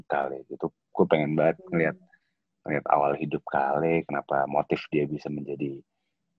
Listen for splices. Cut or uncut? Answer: uncut